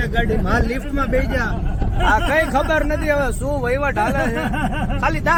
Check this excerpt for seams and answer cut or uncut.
uncut